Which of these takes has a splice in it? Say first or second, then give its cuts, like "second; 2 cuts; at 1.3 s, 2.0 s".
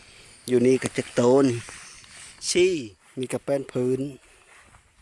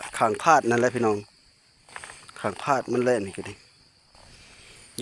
first; 1 cut; at 3.0 s